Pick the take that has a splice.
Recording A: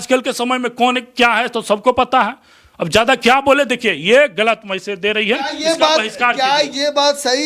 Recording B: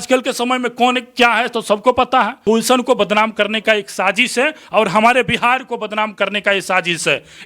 B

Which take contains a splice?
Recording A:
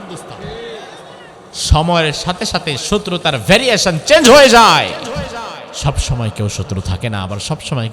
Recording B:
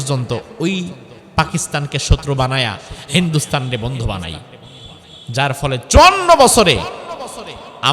A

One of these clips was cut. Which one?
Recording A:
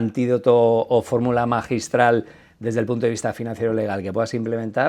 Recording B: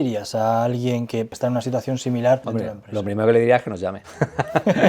B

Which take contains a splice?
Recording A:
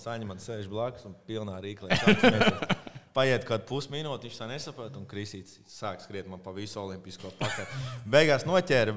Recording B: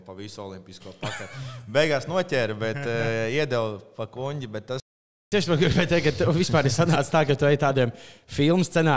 B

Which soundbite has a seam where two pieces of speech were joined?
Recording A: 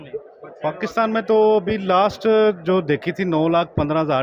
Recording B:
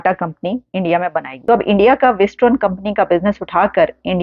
B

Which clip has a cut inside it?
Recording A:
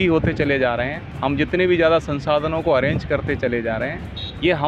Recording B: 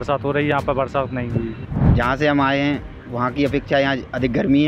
B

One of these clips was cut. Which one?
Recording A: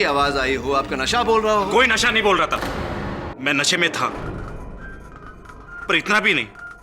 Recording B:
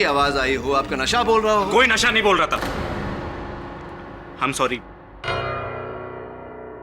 A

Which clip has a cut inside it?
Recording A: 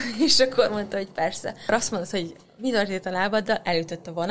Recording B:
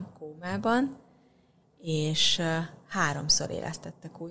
A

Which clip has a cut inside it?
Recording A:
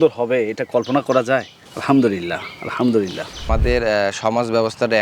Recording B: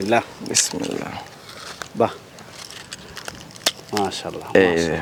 A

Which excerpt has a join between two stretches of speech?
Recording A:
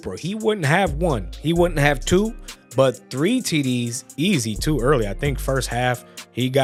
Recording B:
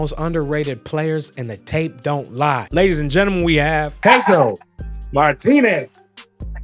B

